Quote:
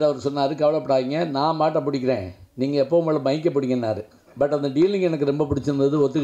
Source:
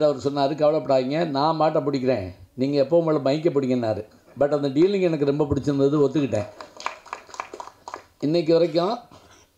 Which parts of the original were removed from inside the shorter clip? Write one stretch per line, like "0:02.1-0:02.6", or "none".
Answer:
none